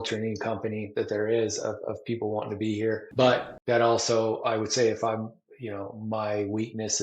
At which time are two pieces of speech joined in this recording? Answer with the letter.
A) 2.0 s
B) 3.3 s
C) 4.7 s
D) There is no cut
B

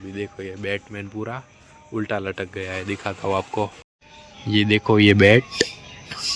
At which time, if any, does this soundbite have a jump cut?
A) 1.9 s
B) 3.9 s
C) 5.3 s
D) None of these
D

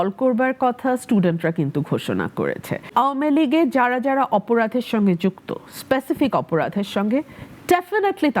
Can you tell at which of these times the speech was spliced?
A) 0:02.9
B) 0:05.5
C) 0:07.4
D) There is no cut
A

